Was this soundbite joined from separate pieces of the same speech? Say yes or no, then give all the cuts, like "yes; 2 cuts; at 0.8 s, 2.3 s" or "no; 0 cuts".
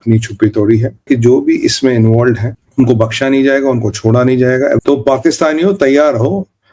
yes; 3 cuts; at 1.0 s, 2.6 s, 4.8 s